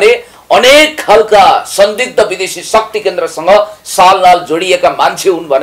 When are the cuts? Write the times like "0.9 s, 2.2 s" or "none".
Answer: none